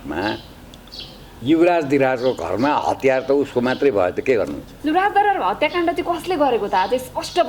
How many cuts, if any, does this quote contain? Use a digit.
1